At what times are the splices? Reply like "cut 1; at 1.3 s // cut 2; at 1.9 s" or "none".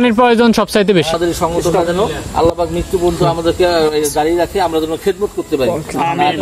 cut 1; at 1.2 s